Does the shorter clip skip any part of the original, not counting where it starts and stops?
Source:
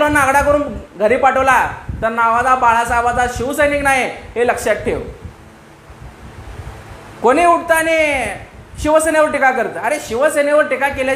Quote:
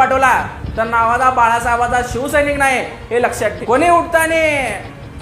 yes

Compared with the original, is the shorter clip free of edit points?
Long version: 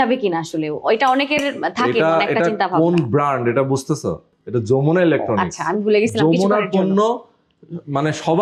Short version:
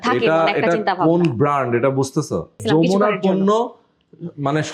no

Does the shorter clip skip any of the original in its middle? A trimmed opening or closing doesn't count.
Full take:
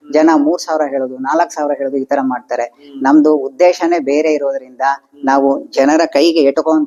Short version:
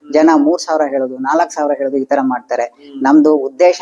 no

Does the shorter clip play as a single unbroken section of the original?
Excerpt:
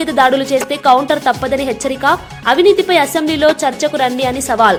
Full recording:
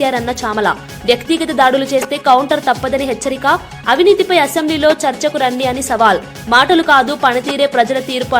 yes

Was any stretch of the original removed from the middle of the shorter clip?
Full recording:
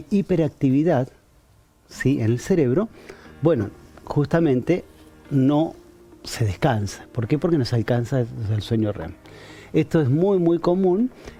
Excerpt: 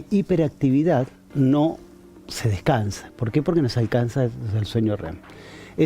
yes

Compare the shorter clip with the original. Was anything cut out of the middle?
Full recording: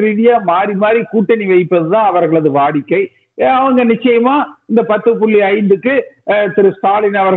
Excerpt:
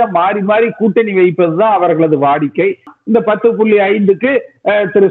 yes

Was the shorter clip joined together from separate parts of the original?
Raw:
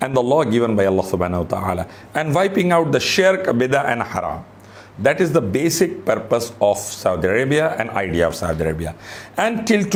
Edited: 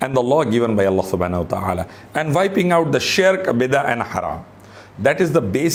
no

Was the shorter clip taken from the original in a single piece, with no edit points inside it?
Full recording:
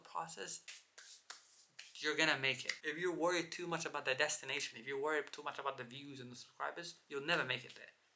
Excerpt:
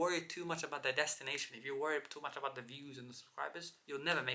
yes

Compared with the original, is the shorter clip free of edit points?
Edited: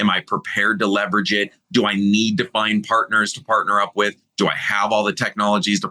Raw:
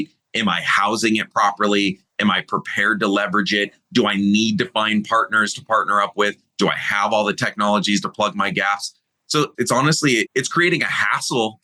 yes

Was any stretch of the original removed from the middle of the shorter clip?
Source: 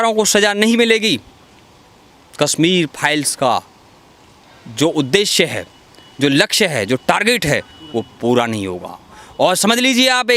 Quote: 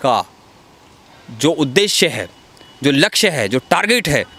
no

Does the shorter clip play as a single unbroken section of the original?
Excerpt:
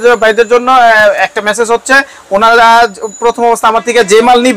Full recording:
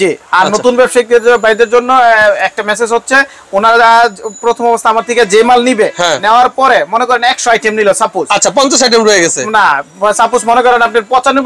yes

